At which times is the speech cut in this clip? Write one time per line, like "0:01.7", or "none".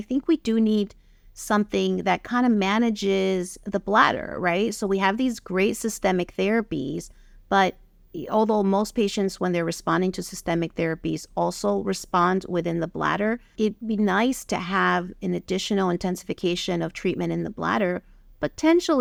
none